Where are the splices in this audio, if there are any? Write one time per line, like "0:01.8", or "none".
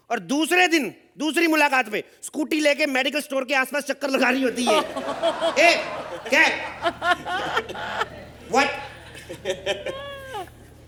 none

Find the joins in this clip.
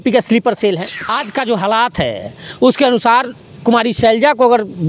0:01.1

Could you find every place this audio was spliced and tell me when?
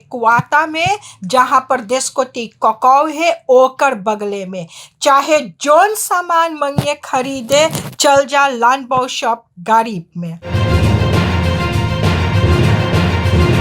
0:10.5

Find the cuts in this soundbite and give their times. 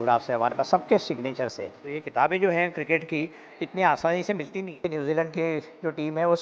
0:01.9
0:04.8

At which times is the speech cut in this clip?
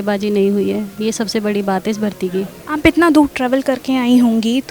none

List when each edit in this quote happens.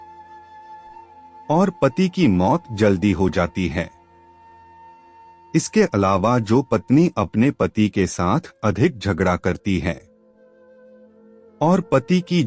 0:10.1
0:11.6

